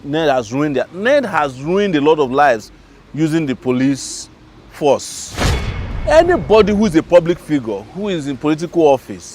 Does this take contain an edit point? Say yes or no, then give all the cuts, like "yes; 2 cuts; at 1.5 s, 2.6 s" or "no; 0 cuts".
yes; 1 cut; at 5.7 s